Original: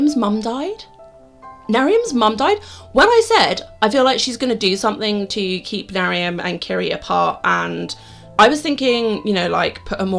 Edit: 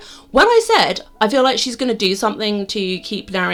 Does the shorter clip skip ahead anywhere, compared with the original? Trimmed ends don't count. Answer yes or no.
no